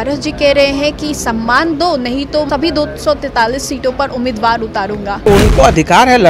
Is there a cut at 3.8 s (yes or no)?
no